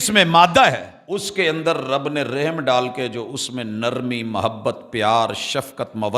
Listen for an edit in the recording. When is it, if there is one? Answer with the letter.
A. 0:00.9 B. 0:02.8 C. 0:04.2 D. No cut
A